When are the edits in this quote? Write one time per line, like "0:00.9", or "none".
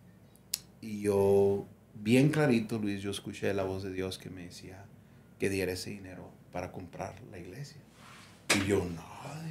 none